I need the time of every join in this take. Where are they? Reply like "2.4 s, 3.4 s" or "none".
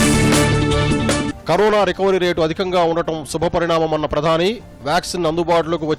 1.3 s